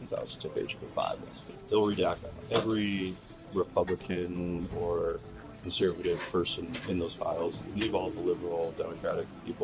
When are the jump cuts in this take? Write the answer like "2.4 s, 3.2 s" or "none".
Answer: 1.4 s